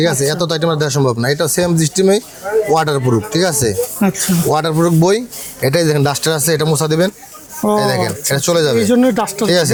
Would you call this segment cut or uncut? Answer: uncut